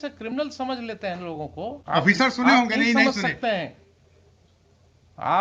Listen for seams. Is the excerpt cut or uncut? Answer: cut